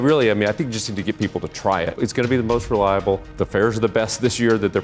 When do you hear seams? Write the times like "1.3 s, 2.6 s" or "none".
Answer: 1.9 s, 3.3 s